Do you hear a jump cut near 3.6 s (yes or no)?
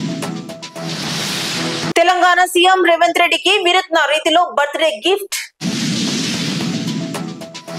no